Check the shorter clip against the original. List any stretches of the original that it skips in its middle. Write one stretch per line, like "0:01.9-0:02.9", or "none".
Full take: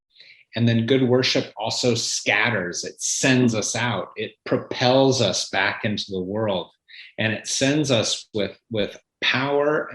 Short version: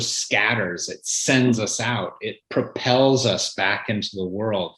none